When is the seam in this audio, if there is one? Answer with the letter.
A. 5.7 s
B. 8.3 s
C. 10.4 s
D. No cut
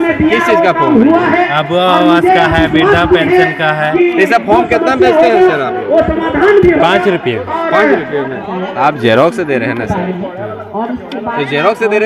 B